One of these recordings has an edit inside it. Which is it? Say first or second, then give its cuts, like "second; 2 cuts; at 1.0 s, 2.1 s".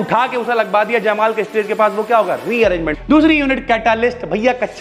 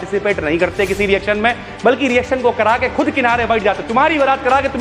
first; 1 cut; at 2.9 s